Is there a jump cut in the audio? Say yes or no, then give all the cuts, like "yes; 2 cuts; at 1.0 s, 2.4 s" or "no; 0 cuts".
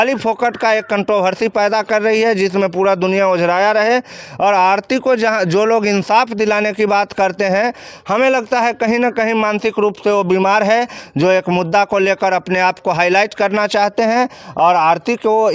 no; 0 cuts